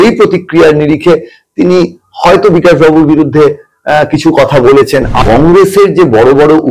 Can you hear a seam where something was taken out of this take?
yes; 1 cut; at 5.2 s

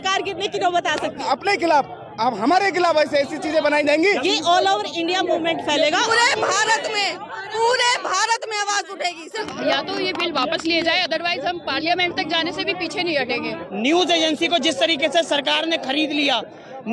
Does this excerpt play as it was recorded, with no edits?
no; 5 cuts; at 1.2 s, 4.2 s, 6.1 s, 9.5 s, 13.6 s

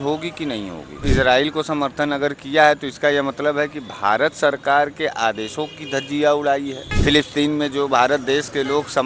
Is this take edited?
yes; 2 cuts; at 1.0 s, 6.8 s

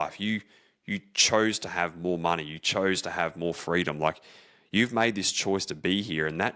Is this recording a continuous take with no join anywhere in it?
yes; 0 cuts

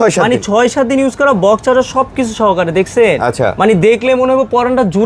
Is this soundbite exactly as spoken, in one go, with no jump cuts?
yes; 0 cuts

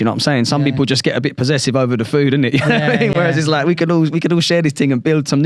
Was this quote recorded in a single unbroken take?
yes; 0 cuts

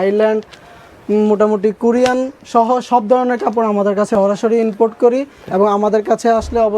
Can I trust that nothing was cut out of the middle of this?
no; 1 cut; at 4.1 s

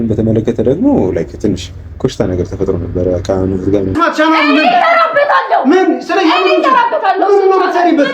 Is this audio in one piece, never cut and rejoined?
no; 1 cut; at 3.9 s

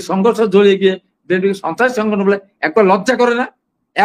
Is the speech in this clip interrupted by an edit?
no; 0 cuts

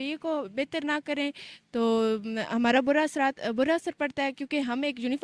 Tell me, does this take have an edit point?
no; 0 cuts

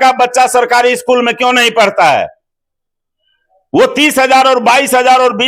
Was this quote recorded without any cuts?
yes; 0 cuts

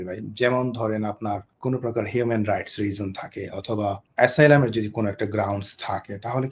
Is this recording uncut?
no; 2 cuts; at 1.5 s, 4.0 s

